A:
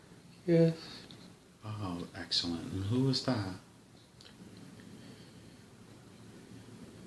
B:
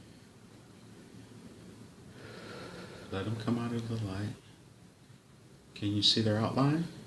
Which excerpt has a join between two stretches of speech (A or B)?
B